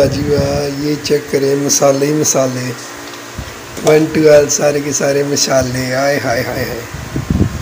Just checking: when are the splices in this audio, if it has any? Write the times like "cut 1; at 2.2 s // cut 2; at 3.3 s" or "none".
none